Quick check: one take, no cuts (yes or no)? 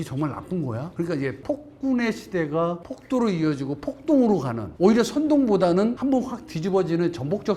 yes